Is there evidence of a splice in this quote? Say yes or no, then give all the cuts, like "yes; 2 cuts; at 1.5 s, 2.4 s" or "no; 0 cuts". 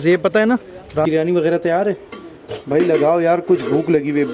yes; 1 cut; at 1.1 s